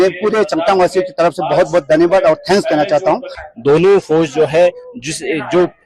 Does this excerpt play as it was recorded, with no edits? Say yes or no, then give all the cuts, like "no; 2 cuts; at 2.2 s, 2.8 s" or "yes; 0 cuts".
no; 1 cut; at 3.4 s